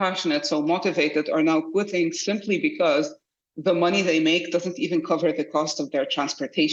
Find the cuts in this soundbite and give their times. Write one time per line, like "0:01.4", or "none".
none